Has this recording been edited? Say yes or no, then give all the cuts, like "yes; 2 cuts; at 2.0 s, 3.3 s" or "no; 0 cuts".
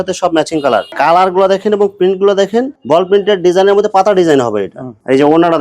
yes; 1 cut; at 0.9 s